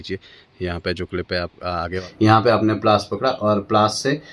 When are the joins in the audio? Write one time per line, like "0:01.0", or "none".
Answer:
0:02.0